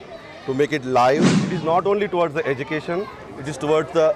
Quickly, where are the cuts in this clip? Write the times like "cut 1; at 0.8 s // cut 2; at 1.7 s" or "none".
cut 1; at 1.3 s